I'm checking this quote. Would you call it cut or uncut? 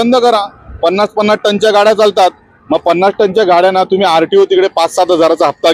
uncut